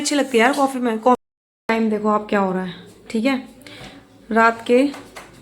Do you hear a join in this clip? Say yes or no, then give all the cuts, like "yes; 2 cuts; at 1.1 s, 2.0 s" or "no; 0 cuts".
yes; 1 cut; at 1.2 s